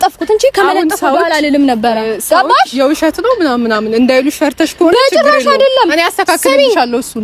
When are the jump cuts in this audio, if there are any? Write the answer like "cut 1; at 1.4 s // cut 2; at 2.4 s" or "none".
none